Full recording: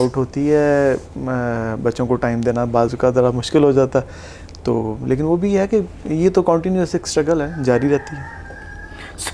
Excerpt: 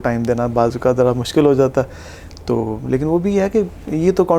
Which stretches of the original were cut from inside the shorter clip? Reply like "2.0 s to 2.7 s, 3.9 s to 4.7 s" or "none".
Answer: none